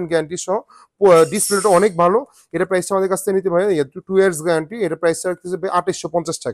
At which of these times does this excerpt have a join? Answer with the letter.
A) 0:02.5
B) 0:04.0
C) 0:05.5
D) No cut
D